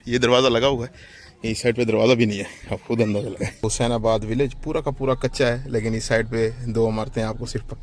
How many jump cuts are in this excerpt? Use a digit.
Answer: 1